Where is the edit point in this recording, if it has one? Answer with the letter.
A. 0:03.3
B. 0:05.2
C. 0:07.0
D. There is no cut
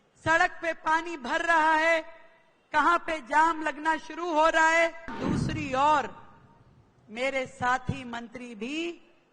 B